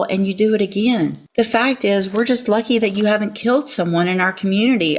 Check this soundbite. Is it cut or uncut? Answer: cut